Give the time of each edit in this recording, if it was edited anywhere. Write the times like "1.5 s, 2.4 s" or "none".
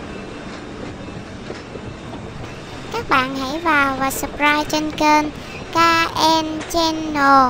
none